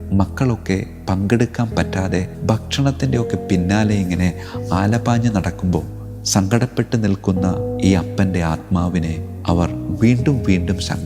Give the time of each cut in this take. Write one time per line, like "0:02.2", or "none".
0:02.3

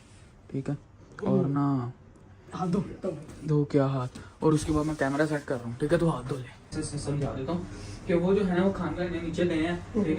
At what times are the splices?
0:06.8

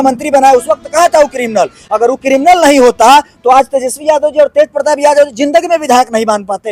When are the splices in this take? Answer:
none

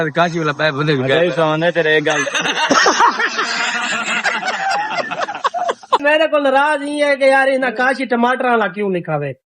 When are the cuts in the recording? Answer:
0:06.0

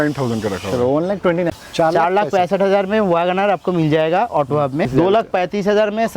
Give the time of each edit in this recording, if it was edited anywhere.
0:01.5
0:04.9

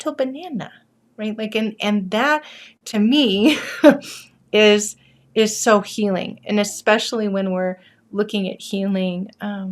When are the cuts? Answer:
none

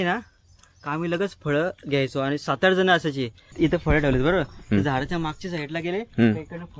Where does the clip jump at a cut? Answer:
0:03.5

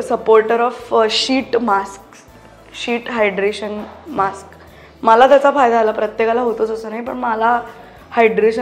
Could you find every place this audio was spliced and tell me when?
none

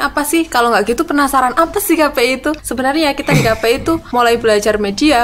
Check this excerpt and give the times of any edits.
0:02.7
0:04.0

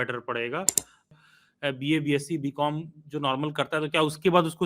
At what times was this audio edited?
0:01.1

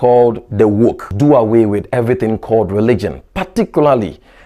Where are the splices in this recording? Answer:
0:01.1

